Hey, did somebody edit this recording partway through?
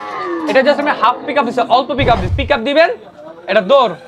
yes; 1 cut; at 2.4 s

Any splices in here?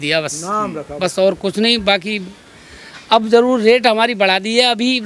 no; 0 cuts

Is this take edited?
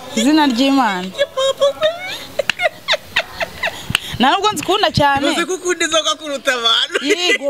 no; 0 cuts

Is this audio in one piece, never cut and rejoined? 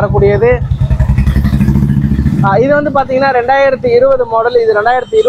yes; 0 cuts

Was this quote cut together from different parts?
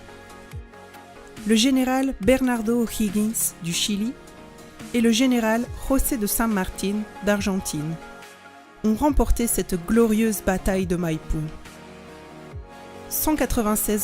yes; 1 cut; at 8.1 s

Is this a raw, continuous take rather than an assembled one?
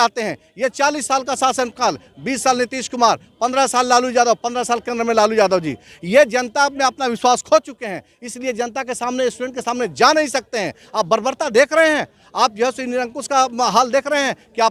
yes; 0 cuts

